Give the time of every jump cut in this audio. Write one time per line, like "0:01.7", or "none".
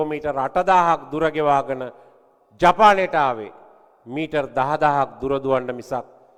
none